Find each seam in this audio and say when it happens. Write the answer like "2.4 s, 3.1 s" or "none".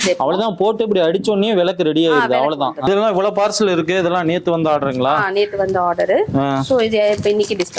2.9 s

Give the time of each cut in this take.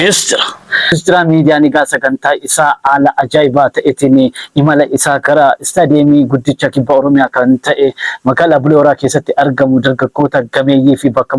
0.9 s

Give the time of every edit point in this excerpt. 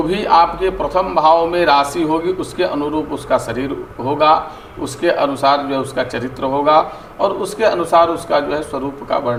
none

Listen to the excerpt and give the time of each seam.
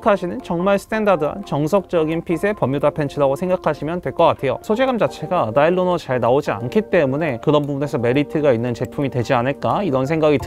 4.6 s, 7.4 s

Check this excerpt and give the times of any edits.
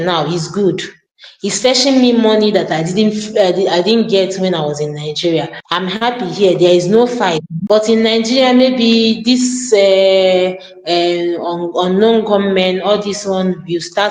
5.6 s, 7.5 s

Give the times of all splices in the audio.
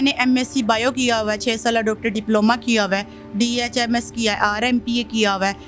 none

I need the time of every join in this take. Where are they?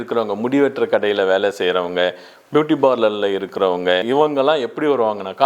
4.0 s

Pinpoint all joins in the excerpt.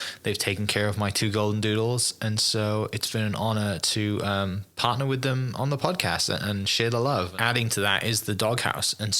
7.3 s

